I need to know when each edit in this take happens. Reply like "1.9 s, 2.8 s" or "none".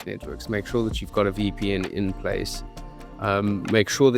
none